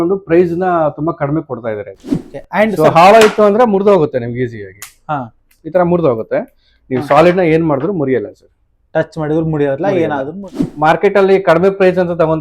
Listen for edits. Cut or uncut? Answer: cut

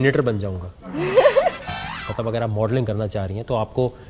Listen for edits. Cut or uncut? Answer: cut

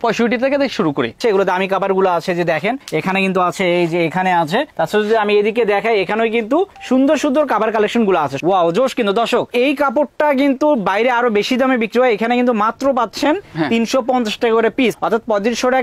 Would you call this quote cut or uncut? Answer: cut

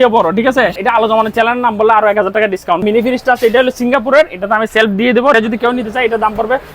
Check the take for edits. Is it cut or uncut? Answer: cut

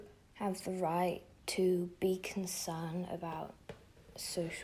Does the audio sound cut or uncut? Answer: uncut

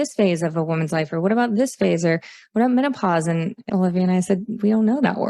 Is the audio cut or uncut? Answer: cut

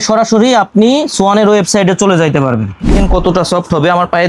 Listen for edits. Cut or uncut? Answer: cut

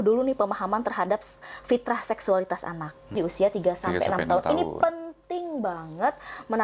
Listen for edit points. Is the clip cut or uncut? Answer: cut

